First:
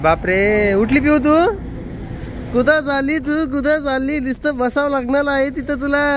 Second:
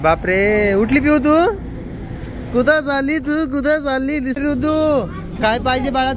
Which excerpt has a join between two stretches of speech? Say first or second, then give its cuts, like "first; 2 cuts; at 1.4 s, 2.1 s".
second; 1 cut; at 4.4 s